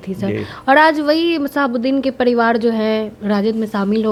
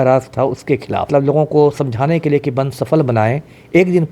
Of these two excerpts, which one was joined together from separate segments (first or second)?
second